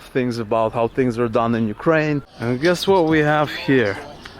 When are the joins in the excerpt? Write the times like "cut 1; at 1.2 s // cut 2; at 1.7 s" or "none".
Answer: cut 1; at 2.3 s